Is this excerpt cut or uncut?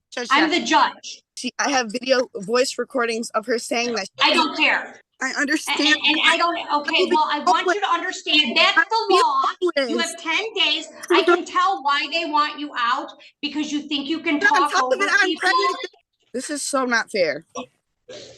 cut